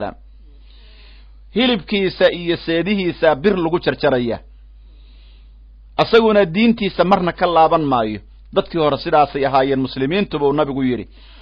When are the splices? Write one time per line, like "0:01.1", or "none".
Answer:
none